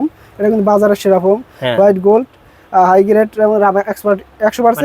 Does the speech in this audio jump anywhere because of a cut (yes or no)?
no